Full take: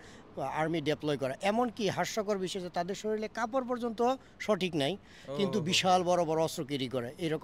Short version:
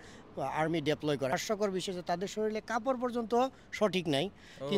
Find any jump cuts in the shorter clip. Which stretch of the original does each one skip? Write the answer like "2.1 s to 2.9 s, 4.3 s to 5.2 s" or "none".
1.3 s to 2.0 s